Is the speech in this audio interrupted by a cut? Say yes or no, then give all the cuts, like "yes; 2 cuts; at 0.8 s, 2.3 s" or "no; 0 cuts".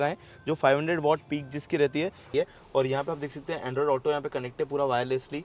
yes; 1 cut; at 2.3 s